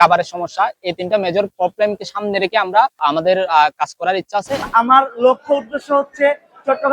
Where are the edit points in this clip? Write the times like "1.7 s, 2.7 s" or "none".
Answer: 3.0 s, 4.7 s